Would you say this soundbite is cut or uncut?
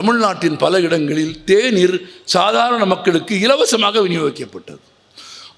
uncut